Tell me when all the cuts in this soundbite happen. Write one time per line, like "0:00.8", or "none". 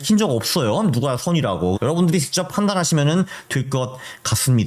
0:01.8